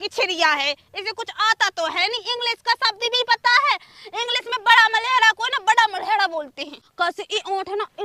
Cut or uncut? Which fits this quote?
uncut